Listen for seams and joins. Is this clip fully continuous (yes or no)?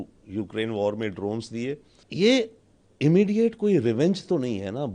no